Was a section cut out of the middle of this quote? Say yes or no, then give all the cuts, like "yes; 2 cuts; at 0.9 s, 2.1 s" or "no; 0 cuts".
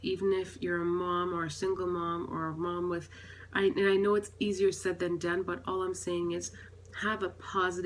no; 0 cuts